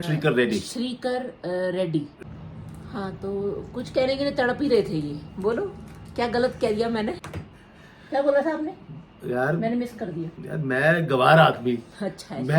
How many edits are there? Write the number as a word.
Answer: two